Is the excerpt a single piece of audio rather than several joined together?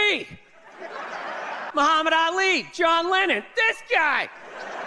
no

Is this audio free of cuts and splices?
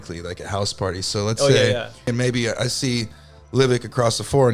no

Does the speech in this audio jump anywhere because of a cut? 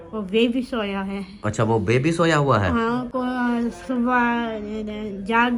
no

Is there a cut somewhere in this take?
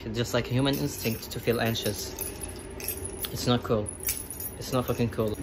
no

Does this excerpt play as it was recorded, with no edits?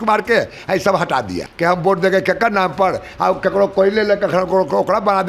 no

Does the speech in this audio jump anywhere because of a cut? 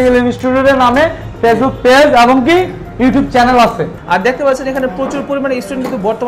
yes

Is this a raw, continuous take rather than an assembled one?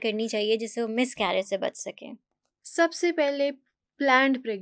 yes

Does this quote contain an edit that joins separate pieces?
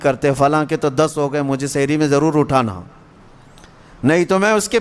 no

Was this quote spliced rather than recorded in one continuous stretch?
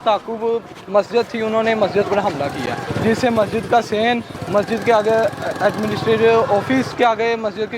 yes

